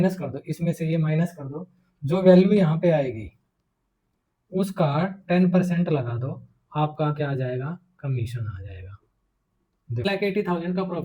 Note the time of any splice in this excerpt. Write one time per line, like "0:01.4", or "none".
0:10.0